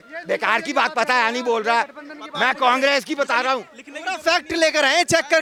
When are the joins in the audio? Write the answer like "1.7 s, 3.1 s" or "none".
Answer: none